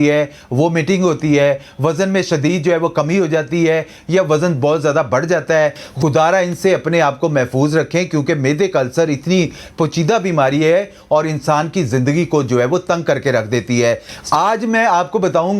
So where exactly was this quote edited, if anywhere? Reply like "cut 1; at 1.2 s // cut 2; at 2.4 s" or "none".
cut 1; at 5.8 s // cut 2; at 14.2 s

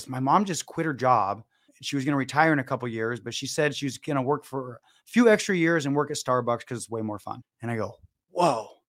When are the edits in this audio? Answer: none

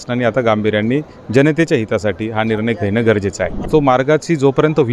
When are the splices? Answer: cut 1; at 3.7 s

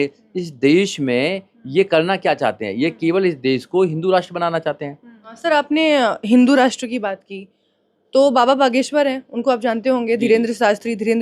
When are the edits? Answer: cut 1; at 5.4 s

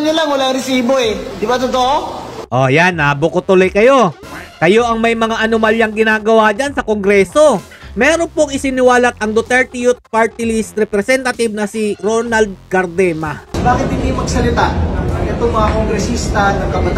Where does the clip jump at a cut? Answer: cut 1; at 1.3 s // cut 2; at 7.9 s // cut 3; at 13.5 s

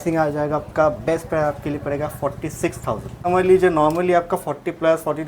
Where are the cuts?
cut 1; at 3.3 s

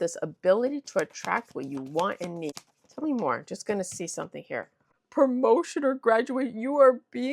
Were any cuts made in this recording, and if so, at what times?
cut 1; at 2.6 s // cut 2; at 5.0 s

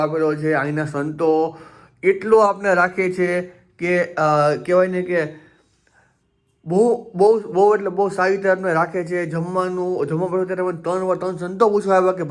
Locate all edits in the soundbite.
none

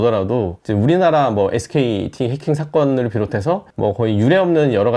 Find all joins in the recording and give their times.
none

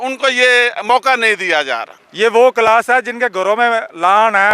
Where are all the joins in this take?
cut 1; at 2.0 s

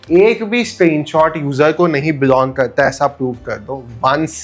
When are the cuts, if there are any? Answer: none

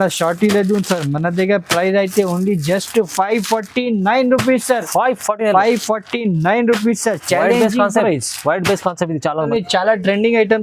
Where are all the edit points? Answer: cut 1; at 9.5 s

